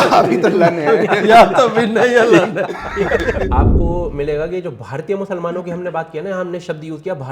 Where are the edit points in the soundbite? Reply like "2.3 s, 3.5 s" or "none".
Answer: 3.5 s